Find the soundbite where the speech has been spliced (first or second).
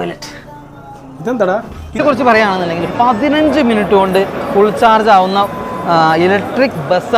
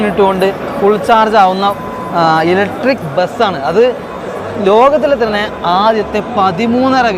first